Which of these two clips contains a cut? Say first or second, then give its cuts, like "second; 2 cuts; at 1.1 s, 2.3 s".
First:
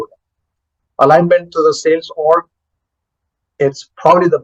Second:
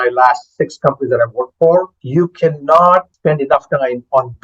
second; 2 cuts; at 2.0 s, 3.1 s